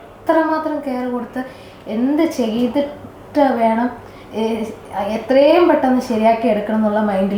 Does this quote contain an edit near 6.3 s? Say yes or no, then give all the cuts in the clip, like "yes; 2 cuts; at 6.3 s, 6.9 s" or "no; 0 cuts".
no; 0 cuts